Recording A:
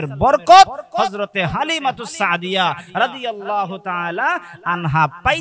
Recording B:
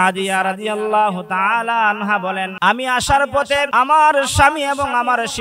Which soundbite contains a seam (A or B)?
B